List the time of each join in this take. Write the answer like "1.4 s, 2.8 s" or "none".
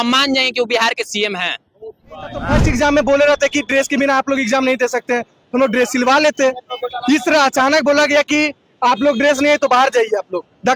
2.5 s